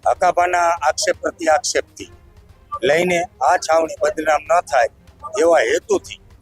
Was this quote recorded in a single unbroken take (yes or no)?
yes